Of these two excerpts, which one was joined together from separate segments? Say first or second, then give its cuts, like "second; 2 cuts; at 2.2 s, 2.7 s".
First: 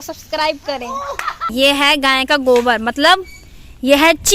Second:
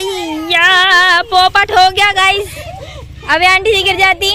first; 1 cut; at 1.5 s